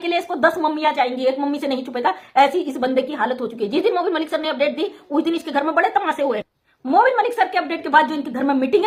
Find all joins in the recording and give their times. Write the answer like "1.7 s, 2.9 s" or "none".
none